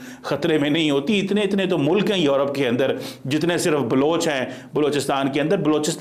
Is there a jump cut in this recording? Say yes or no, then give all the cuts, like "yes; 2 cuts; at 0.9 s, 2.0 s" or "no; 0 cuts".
no; 0 cuts